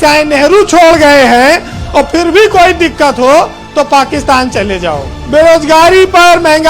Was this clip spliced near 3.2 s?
no; 1 cut; at 5.1 s

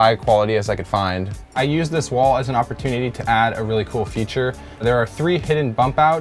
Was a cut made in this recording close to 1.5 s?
yes; 1 cut; at 1.5 s

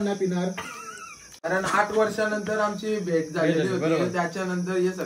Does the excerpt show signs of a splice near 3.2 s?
no; 1 cut; at 1.3 s

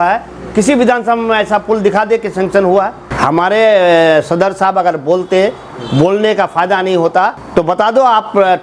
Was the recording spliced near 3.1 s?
yes; 2 cuts; at 3.1 s, 7.4 s

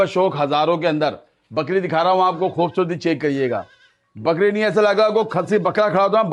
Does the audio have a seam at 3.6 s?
no; 0 cuts

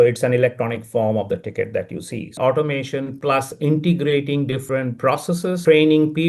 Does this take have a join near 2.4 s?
yes; 1 cut; at 2.4 s

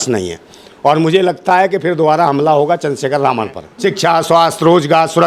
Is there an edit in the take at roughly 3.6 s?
yes; 1 cut; at 3.6 s

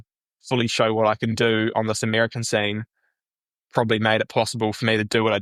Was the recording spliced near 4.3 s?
no; 0 cuts

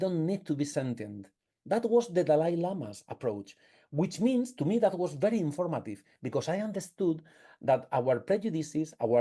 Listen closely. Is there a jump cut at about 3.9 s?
no; 0 cuts

